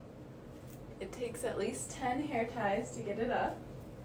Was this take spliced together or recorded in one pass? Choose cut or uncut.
uncut